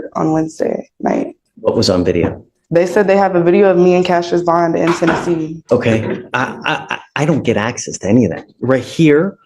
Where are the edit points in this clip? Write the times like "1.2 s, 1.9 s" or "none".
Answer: 1.4 s, 5.6 s